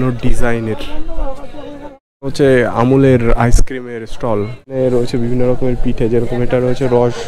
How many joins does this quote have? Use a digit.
2